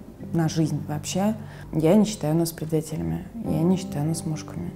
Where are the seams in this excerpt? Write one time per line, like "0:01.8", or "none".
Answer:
none

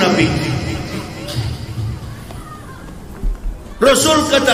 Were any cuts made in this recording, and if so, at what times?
none

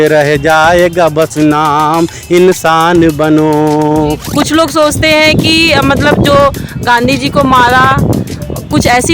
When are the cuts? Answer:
0:04.2

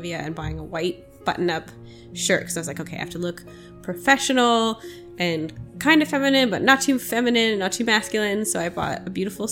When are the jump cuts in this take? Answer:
none

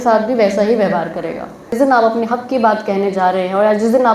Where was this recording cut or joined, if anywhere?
0:01.7

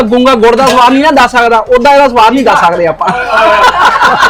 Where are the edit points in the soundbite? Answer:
none

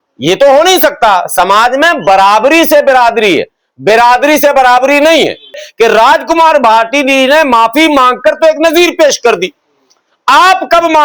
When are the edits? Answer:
0:05.6

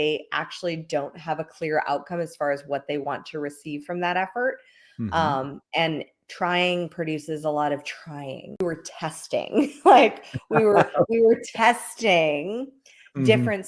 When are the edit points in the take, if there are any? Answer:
0:08.6

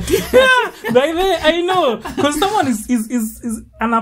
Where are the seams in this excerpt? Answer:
none

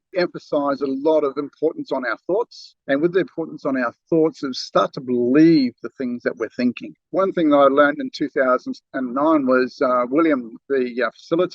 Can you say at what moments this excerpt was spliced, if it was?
0:07.0

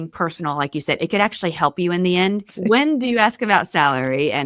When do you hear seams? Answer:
0:02.5

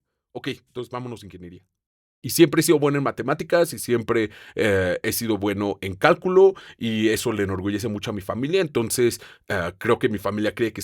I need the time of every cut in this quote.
0:02.0

